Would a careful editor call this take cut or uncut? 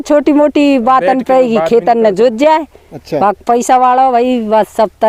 uncut